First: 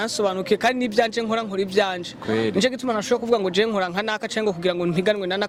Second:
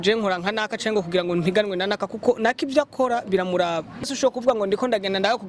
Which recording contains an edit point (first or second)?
second